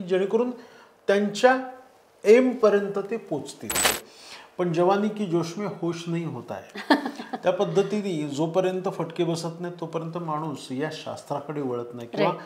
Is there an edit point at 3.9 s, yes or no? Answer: yes